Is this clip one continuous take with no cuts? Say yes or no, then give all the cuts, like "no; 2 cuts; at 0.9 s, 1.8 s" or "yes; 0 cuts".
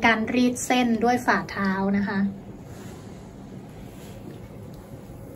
yes; 0 cuts